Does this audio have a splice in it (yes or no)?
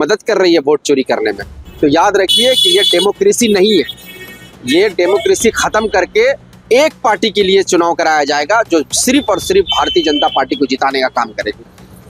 yes